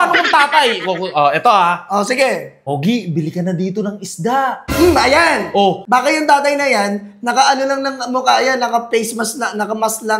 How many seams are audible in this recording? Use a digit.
2